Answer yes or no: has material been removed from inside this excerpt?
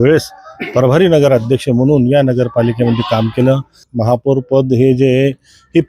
yes